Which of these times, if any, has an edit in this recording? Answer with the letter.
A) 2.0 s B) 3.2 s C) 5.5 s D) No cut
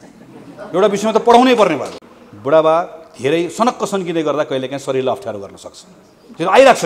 A